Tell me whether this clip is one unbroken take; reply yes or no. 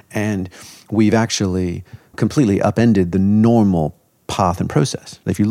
yes